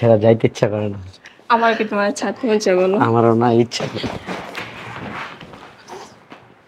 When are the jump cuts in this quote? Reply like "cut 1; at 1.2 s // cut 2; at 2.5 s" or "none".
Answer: none